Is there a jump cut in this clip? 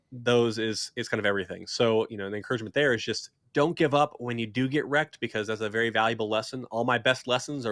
no; 0 cuts

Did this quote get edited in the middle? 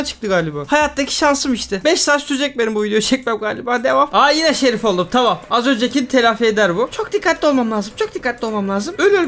no; 0 cuts

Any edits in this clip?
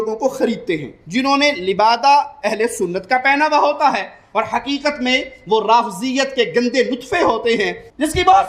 no; 0 cuts

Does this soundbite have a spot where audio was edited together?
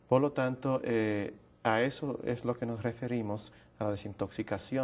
no; 0 cuts

